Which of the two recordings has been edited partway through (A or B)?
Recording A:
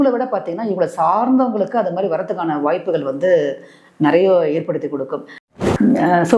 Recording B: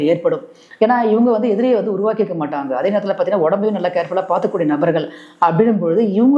A